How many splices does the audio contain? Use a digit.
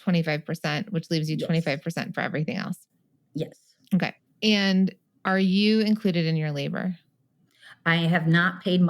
2